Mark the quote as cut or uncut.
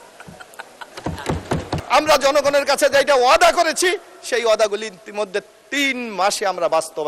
cut